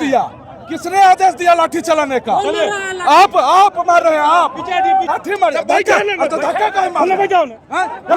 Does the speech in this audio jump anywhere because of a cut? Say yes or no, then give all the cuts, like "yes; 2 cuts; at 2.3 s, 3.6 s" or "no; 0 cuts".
yes; 1 cut; at 5.1 s